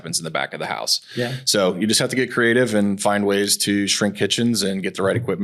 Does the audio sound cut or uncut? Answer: uncut